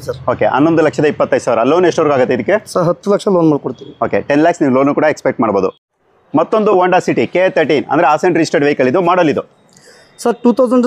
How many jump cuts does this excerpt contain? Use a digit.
0